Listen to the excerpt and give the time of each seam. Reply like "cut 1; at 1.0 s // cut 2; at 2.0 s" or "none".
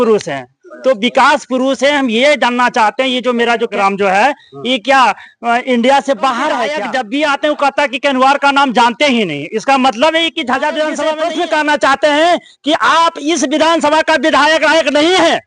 cut 1; at 3.7 s // cut 2; at 6.7 s // cut 3; at 11.1 s